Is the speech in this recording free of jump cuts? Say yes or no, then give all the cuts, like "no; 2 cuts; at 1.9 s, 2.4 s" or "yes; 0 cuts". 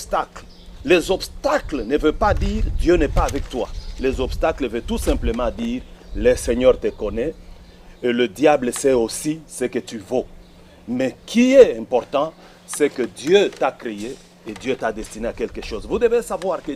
yes; 0 cuts